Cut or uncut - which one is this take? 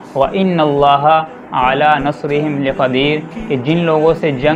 uncut